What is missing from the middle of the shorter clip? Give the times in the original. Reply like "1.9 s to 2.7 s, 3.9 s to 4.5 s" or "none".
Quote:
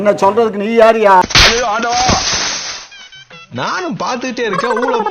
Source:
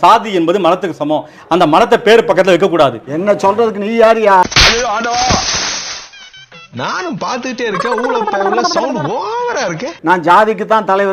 none